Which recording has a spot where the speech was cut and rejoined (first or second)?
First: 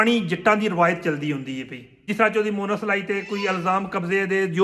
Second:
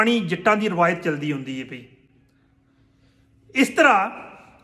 first